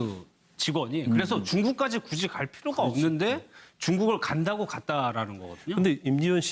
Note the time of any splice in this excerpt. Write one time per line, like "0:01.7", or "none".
none

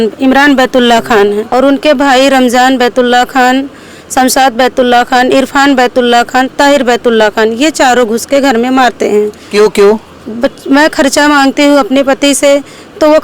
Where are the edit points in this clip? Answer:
0:01.4

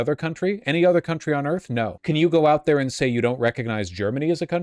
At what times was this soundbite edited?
0:02.0

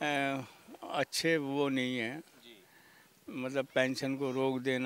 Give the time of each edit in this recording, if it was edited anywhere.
none

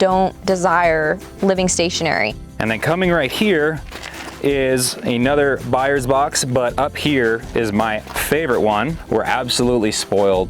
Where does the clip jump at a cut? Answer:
0:02.4
0:08.0
0:09.0

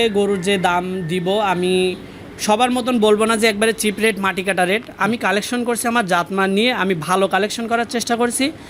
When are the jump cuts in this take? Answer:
none

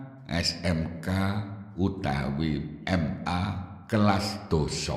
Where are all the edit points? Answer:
0:03.3

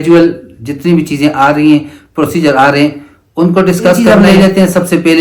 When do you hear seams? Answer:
0:04.0

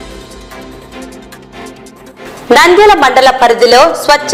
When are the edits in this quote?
none

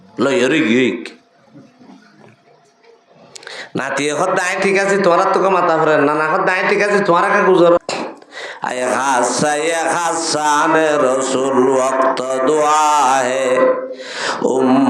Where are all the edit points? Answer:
0:07.8

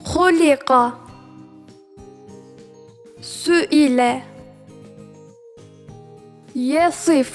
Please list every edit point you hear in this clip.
none

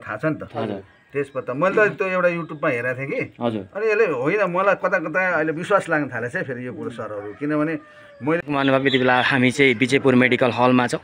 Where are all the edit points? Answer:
0:08.4

